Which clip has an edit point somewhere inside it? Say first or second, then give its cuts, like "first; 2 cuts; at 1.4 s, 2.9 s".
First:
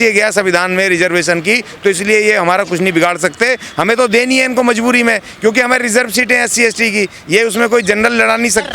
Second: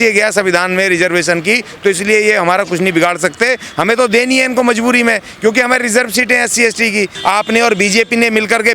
second; 1 cut; at 7.1 s